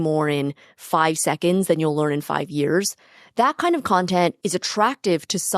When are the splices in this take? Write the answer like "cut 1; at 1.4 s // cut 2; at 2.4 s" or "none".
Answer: cut 1; at 4.4 s